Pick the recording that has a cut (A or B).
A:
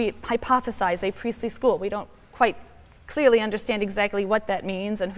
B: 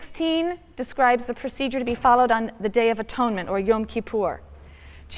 B